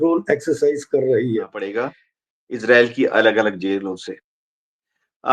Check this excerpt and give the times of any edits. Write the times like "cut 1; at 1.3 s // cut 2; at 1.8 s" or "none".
cut 1; at 1.7 s